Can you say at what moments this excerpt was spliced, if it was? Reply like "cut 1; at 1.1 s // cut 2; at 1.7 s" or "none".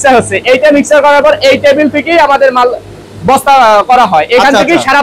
none